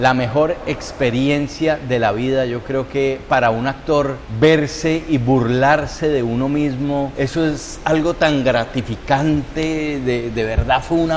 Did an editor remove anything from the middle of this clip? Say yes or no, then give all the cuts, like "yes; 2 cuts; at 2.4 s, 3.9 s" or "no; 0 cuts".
no; 0 cuts